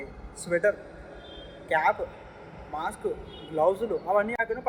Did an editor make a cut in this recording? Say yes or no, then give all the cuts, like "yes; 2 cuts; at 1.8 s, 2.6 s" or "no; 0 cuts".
no; 0 cuts